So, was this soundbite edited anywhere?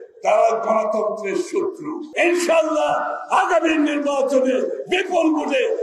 yes; 1 cut; at 2.0 s

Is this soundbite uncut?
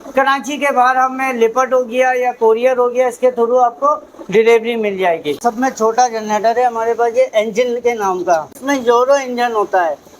no; 2 cuts; at 5.4 s, 8.6 s

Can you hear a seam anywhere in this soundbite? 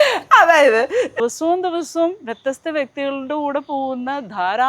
yes; 1 cut; at 1.2 s

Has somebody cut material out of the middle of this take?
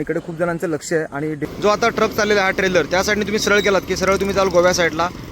yes; 1 cut; at 1.4 s

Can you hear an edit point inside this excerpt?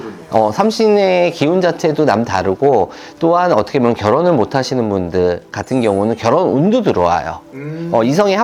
no; 0 cuts

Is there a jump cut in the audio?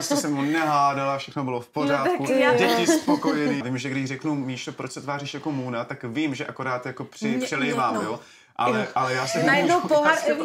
yes; 1 cut; at 3.6 s

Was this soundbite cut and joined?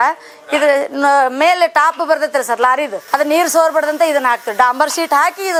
no; 0 cuts

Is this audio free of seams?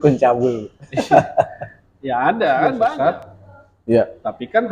no; 1 cut; at 3.1 s

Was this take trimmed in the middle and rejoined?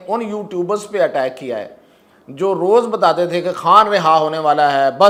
no; 0 cuts

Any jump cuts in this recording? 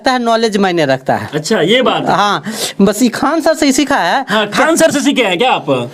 no; 0 cuts

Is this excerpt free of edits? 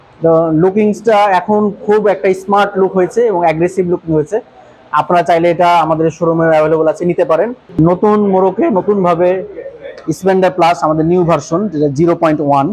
no; 1 cut; at 7.6 s

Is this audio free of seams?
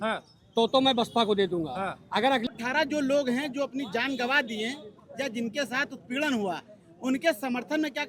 no; 1 cut; at 2.5 s

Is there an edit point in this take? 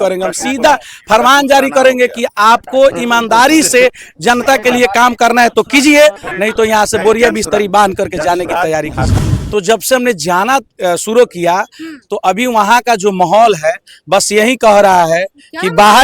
yes; 1 cut; at 9.2 s

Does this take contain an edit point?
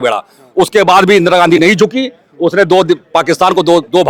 no; 0 cuts

